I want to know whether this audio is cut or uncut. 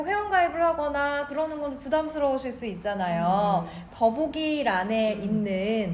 uncut